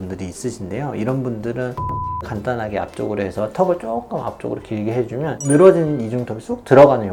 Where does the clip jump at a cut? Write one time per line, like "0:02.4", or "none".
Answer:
none